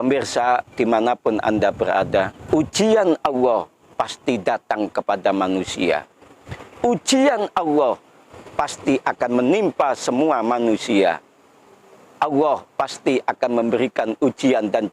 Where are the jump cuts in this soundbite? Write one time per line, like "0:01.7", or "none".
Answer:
0:02.4